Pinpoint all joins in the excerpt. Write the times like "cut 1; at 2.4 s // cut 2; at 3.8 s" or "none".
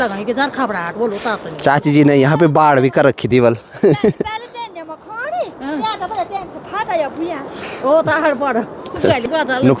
none